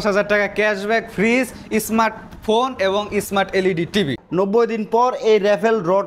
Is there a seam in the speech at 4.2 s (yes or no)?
yes